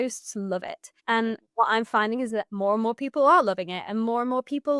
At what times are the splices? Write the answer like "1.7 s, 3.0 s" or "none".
1.3 s, 2.5 s

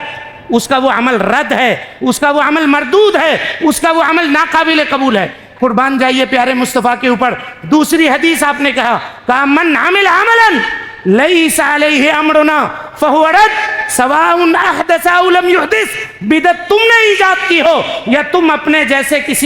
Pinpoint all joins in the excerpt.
5.4 s

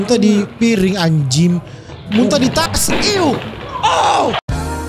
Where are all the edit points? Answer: none

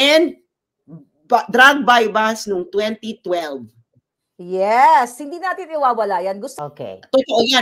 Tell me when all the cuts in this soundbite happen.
6.5 s

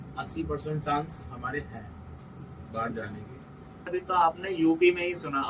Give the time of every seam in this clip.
3.9 s

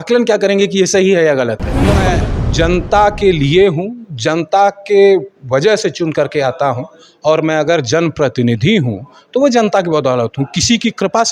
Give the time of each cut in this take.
2.0 s

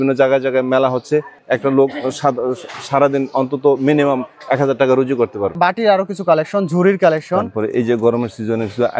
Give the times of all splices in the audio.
1.4 s, 5.6 s

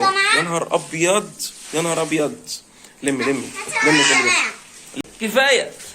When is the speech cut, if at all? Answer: 5.0 s

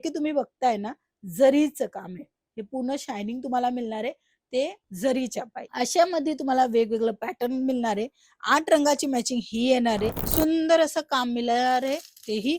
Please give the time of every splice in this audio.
10.2 s

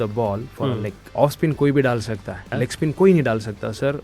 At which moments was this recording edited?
1.0 s, 2.4 s

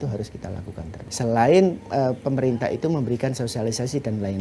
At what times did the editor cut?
1.0 s

